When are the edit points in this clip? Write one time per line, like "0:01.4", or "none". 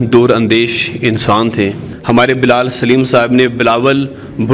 0:01.9